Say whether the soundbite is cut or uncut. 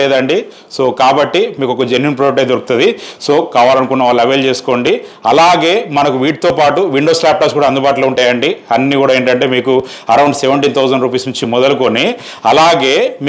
uncut